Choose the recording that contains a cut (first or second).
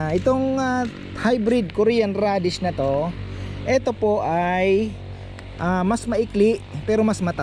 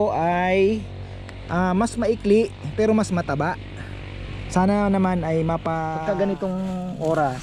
second